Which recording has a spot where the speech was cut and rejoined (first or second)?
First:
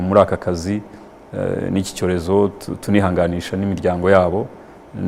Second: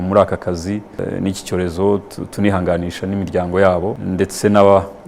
second